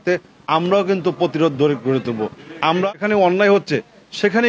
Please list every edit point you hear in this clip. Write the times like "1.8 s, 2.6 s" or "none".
2.9 s